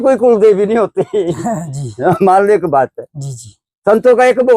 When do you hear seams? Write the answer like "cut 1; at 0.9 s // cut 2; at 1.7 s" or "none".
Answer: none